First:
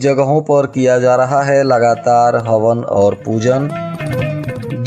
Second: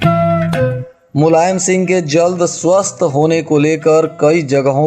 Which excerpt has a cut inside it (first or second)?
second